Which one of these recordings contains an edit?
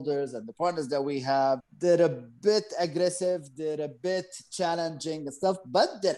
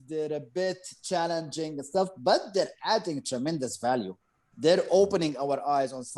first; 1 cut; at 1.7 s

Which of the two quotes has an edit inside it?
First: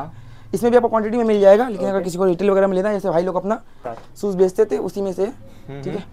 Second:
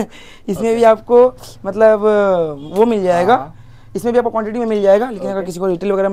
first; 1 cut; at 4.0 s

